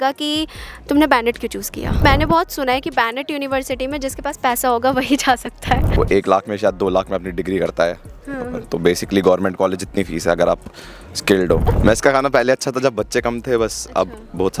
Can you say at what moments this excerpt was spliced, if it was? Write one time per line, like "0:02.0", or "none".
0:02.0
0:05.9
0:11.6